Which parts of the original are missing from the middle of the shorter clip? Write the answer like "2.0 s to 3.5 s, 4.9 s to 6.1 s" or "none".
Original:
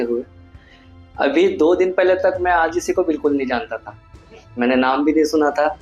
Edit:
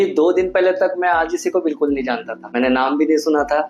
3.8 s to 4.4 s